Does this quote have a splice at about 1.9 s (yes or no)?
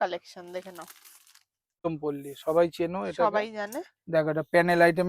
yes